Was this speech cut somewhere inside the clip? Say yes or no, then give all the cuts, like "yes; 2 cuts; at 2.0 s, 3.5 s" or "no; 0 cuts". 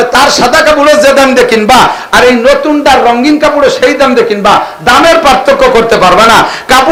no; 0 cuts